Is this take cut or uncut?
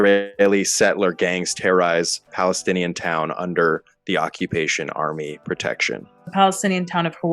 cut